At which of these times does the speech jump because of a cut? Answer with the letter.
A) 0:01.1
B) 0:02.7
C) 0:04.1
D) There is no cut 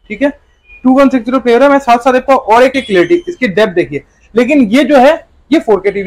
B